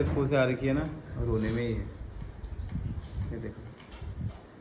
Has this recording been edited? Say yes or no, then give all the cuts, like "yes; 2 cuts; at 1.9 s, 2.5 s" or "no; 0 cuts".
no; 0 cuts